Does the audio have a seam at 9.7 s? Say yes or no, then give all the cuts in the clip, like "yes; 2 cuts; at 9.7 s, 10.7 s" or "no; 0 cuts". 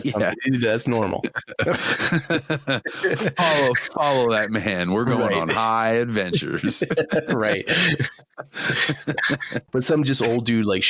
yes; 1 cut; at 9.7 s